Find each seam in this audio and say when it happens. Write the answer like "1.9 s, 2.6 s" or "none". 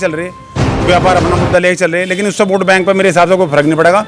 none